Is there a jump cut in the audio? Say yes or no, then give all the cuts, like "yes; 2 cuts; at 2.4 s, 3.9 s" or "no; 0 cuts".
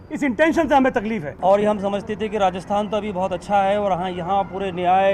yes; 1 cut; at 1.3 s